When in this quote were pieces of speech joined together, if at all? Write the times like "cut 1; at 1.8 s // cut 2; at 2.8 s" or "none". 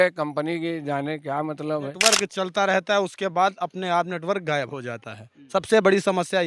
cut 1; at 2.0 s